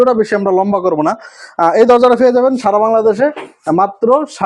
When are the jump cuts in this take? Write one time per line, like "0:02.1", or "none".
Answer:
none

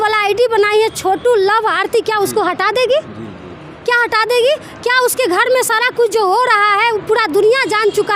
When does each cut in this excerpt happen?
none

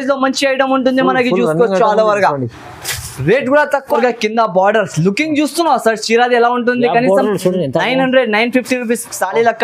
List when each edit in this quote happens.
0:04.0

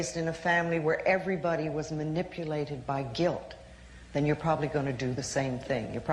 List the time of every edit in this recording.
none

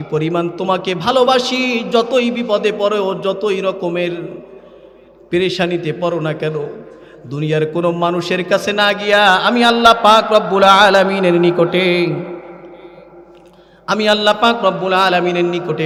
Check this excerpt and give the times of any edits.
none

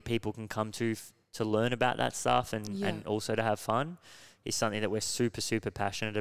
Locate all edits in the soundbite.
none

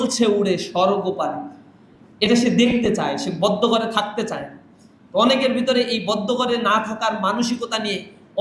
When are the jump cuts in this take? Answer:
none

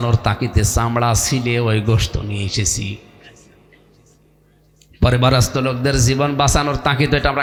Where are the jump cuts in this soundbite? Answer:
none

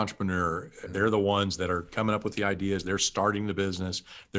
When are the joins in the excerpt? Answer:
0:00.9

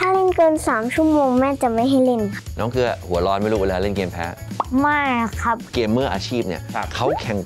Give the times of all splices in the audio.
0:02.4
0:05.7

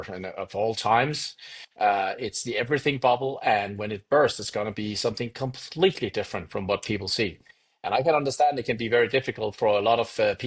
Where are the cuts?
none

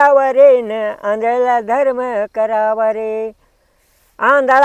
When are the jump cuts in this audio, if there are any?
none

